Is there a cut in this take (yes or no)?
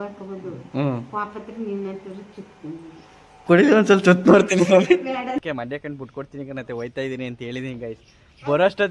yes